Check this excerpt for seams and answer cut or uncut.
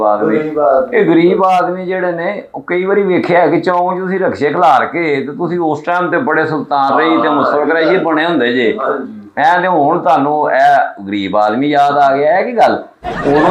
uncut